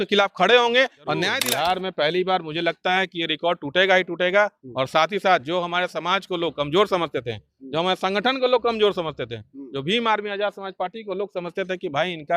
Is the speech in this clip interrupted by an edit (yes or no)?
yes